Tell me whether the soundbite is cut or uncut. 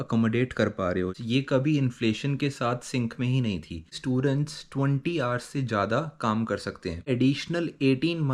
cut